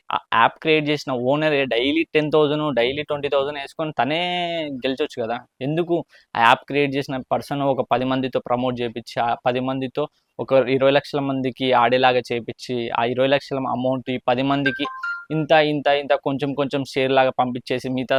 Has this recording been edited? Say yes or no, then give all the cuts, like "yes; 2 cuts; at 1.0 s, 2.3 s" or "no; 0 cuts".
no; 0 cuts